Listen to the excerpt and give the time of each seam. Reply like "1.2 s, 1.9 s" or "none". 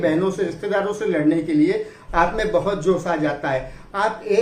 none